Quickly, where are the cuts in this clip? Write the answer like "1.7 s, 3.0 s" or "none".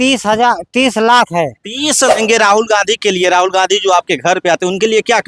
2.1 s